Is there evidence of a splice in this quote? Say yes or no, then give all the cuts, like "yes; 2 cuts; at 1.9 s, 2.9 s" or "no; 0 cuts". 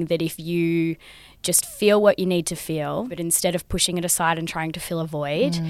yes; 1 cut; at 3.1 s